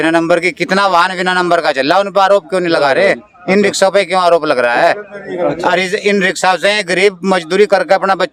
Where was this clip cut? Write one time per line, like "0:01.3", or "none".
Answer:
none